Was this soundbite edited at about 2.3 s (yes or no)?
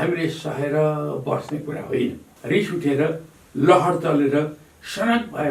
yes